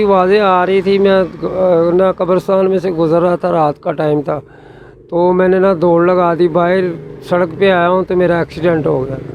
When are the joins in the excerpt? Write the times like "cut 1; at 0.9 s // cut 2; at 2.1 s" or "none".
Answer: none